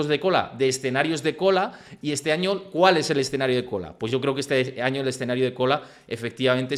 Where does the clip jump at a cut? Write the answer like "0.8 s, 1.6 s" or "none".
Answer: none